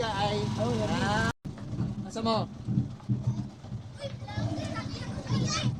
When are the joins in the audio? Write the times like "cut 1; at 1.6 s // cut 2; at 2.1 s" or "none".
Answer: cut 1; at 1.4 s